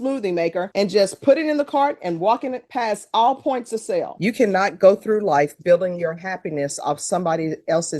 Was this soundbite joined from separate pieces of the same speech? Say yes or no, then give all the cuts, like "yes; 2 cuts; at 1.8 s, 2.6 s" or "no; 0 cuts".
yes; 1 cut; at 4.1 s